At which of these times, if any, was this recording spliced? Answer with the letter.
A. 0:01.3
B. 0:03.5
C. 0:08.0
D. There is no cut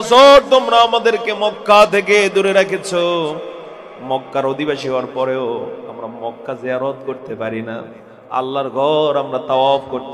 D